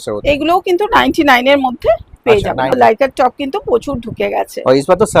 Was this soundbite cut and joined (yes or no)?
yes